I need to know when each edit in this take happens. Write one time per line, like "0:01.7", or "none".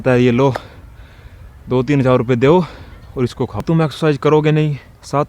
0:03.6